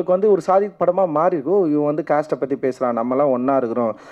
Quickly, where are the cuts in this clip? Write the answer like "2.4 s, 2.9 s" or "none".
none